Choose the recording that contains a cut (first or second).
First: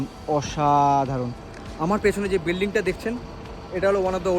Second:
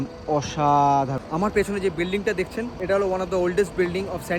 second